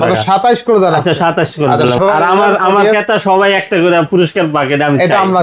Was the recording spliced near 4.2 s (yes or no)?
no